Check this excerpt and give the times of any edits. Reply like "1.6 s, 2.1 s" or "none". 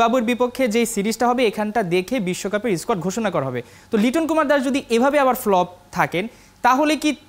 none